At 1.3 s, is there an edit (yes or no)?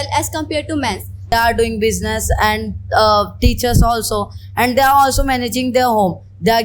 yes